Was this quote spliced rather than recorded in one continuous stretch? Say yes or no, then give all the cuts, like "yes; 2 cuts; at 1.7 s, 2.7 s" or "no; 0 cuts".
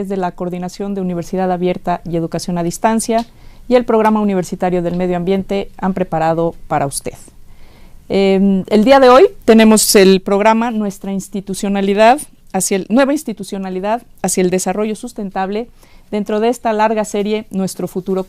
yes; 1 cut; at 7.2 s